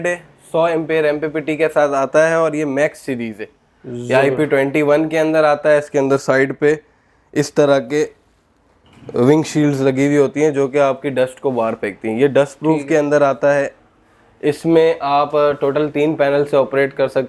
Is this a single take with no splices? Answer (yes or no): yes